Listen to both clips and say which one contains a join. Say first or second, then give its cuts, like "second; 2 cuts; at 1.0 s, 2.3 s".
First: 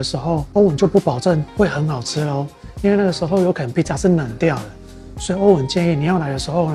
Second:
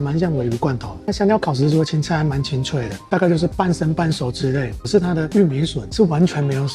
second; 3 cuts; at 1.0 s, 3.1 s, 4.8 s